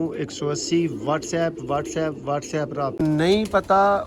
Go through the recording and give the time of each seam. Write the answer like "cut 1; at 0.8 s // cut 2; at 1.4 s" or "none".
cut 1; at 3.0 s